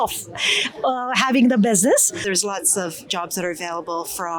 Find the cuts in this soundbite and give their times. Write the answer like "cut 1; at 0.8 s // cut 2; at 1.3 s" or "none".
cut 1; at 2.2 s